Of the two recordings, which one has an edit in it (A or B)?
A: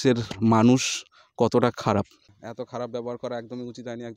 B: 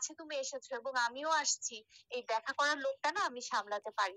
A